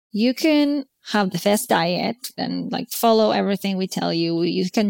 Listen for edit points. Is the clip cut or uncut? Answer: cut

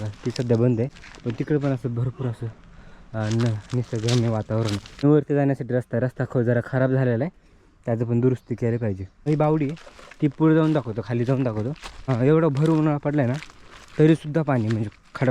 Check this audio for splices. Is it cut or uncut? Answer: cut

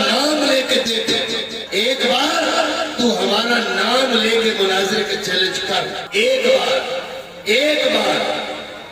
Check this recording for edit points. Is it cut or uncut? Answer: cut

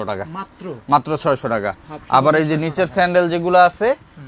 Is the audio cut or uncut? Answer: uncut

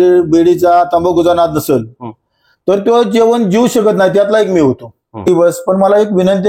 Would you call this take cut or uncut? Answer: cut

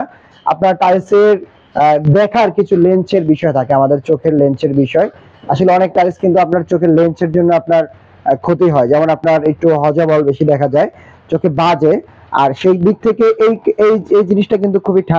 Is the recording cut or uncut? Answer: uncut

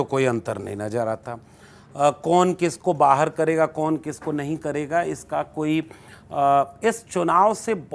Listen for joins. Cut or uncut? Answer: uncut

